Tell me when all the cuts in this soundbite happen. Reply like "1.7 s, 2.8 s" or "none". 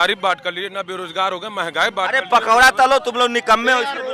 none